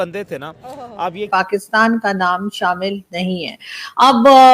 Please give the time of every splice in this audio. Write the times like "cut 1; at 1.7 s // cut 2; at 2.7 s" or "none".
cut 1; at 1.3 s